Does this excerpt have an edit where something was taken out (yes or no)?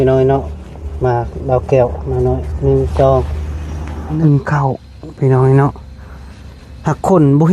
yes